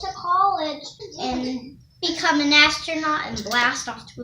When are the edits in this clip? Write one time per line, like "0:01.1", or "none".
0:00.9